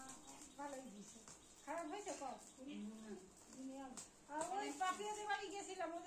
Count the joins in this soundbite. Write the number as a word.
zero